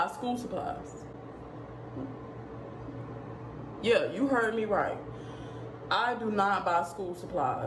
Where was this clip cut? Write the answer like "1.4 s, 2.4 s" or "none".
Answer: none